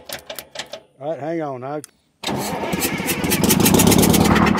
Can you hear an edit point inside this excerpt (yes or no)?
yes